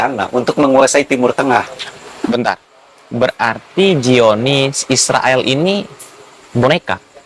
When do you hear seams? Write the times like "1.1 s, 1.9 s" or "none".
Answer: none